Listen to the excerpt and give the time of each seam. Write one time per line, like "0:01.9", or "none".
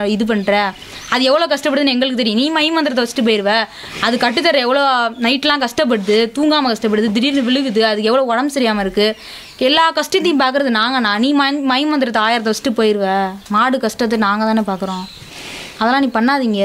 none